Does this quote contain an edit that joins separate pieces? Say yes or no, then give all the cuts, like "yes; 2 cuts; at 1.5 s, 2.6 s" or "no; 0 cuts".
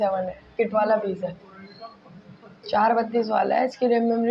no; 0 cuts